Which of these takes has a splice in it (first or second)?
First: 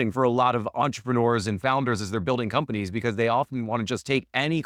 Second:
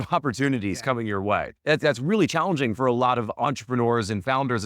second